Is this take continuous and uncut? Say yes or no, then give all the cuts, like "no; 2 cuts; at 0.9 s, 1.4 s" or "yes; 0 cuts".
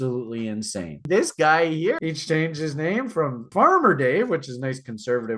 no; 3 cuts; at 1.0 s, 2.0 s, 3.5 s